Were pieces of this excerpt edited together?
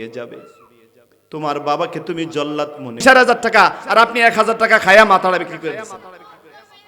yes; 1 cut; at 3.0 s

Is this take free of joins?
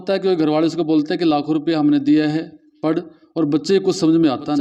yes; 0 cuts

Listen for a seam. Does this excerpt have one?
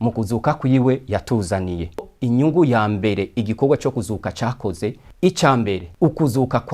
yes; 3 cuts; at 2.1 s, 5.1 s, 5.9 s

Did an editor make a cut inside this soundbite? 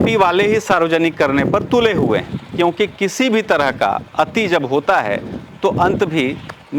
no; 0 cuts

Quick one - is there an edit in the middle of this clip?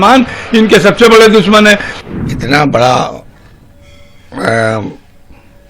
yes; 1 cut; at 1.9 s

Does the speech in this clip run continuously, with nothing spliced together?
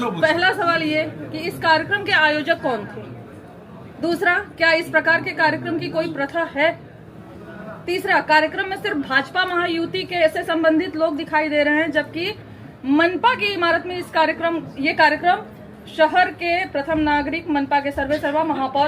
yes; 0 cuts

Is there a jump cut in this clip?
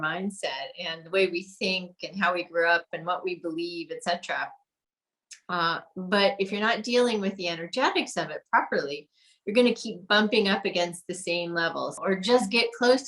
yes; 1 cut; at 12.0 s

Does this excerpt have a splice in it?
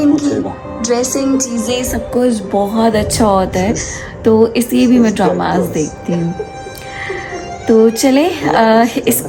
no; 0 cuts

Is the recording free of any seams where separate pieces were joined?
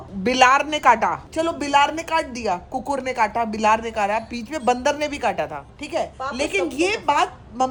yes; 0 cuts

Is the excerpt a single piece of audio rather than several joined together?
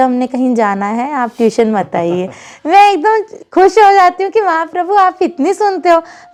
yes; 0 cuts

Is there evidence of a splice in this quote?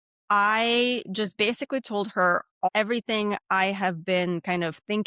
yes; 1 cut; at 2.7 s

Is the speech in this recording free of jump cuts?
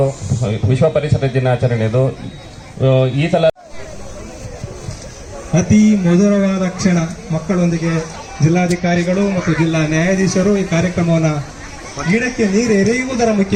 yes; 0 cuts

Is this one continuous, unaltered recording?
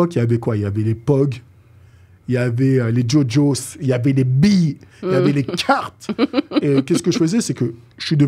yes; 0 cuts

